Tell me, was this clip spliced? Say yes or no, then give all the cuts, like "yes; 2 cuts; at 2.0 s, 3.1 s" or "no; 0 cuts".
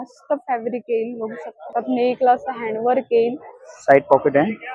yes; 1 cut; at 1.6 s